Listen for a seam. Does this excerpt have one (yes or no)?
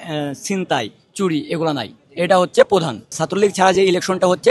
no